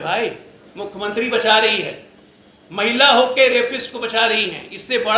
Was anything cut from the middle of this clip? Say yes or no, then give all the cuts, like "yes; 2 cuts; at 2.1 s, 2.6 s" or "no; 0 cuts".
no; 0 cuts